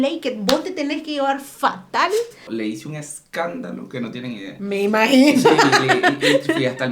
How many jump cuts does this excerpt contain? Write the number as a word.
one